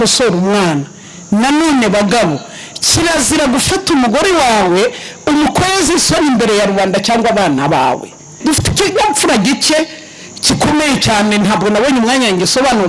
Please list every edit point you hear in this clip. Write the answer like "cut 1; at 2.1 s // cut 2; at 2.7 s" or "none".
cut 1; at 8.3 s

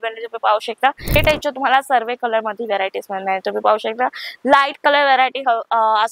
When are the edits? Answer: cut 1; at 1.2 s

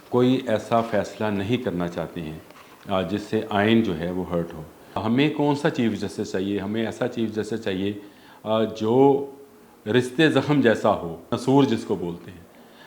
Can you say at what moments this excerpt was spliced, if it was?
cut 1; at 5.0 s // cut 2; at 11.3 s

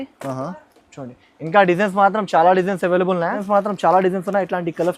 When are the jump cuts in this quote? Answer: cut 1; at 3.4 s

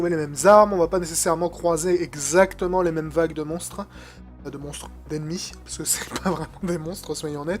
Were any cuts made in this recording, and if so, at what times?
cut 1; at 3.1 s

